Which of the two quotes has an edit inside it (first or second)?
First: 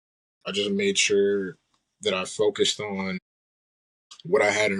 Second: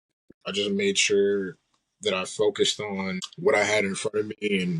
second